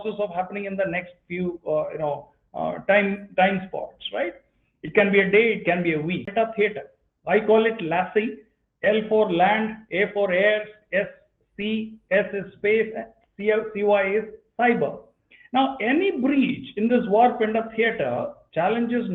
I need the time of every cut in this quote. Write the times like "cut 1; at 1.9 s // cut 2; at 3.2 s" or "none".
cut 1; at 6.3 s